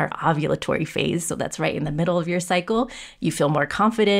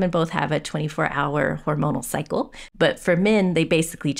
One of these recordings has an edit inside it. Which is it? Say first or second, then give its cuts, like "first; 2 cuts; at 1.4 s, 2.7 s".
second; 1 cut; at 2.6 s